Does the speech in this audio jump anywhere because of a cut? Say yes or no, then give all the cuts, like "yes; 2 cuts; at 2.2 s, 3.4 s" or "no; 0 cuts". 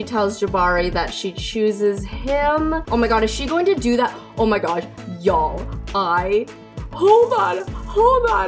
no; 0 cuts